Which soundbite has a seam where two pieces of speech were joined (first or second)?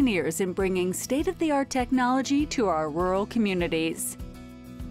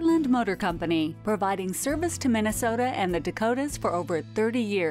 first